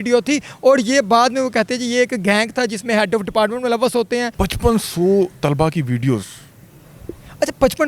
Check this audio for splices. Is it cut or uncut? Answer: cut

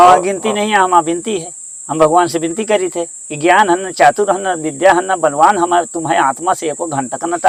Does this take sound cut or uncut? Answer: uncut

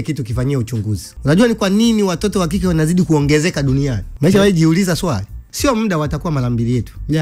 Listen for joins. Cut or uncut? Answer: cut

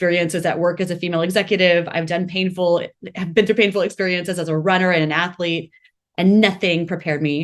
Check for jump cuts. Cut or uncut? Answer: uncut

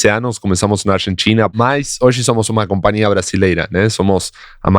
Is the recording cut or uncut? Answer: cut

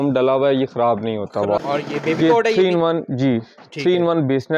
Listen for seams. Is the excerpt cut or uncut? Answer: cut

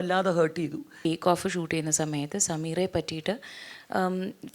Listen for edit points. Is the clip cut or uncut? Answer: cut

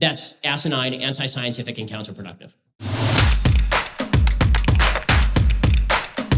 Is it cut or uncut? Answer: cut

